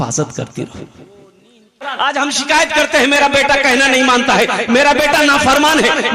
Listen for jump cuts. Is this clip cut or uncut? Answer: cut